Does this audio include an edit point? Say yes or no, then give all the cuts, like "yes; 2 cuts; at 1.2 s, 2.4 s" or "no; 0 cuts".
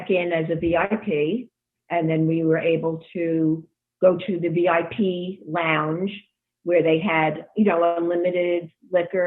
no; 0 cuts